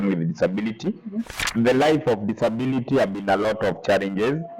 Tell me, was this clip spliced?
yes; 1 cut; at 1.3 s

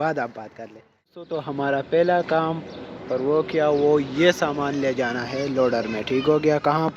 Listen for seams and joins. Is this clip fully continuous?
no; 1 cut; at 1.2 s

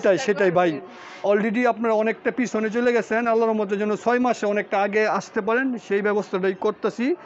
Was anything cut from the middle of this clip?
no; 0 cuts

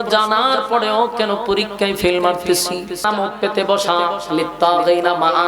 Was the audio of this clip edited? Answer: yes; 1 cut; at 3.0 s

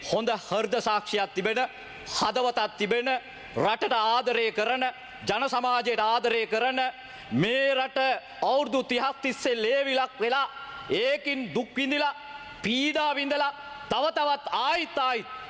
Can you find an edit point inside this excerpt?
no; 0 cuts

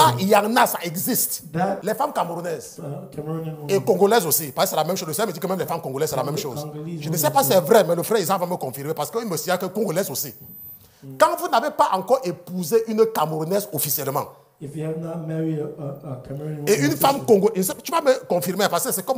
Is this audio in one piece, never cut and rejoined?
no; 1 cut; at 1.8 s

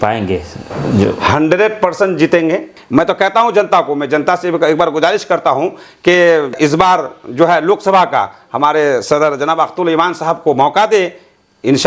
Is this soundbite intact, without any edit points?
no; 2 cuts; at 2.8 s, 6.5 s

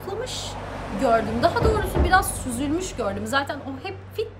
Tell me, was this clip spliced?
no; 0 cuts

